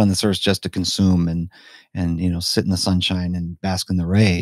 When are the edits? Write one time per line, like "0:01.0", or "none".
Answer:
none

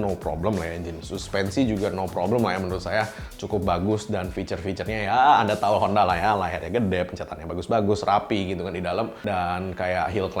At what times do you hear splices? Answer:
none

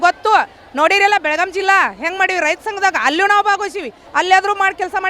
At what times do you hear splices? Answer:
0:04.0

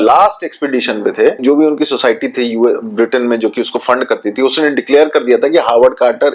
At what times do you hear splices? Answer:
0:01.4

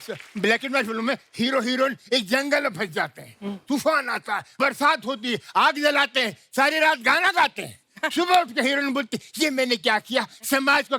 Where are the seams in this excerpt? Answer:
none

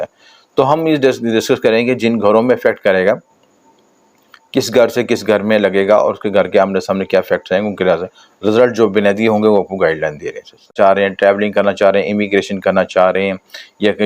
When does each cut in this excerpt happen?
0:10.7

